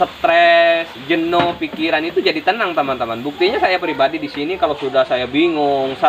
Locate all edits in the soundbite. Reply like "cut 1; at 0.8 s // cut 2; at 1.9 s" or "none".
none